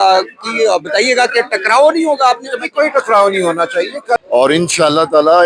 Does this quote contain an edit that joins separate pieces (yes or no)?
yes